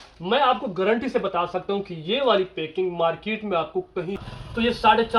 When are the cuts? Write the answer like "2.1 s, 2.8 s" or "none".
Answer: 4.2 s